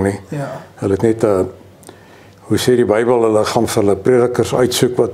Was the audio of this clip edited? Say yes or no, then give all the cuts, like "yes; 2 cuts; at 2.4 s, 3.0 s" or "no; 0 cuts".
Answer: no; 0 cuts